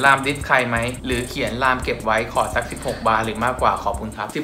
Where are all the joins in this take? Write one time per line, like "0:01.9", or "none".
none